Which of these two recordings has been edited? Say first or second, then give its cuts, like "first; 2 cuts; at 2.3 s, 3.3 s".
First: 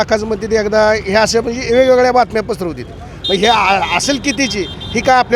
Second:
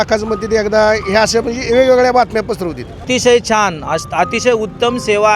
second; 1 cut; at 3.0 s